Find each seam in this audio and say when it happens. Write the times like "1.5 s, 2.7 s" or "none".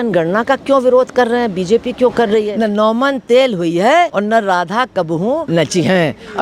2.5 s, 4.1 s, 5.4 s